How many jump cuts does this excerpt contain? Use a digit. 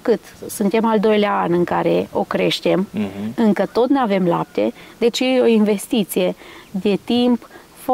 0